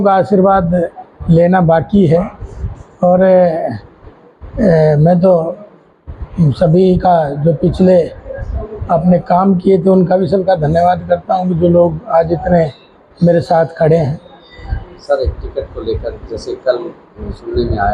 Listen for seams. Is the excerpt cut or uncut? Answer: uncut